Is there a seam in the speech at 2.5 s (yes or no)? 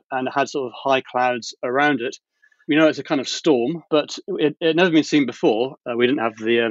no